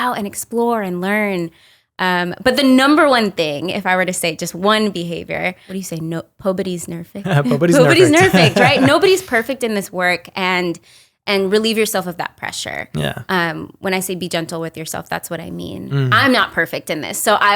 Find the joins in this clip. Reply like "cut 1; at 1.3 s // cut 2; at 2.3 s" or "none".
cut 1; at 5.7 s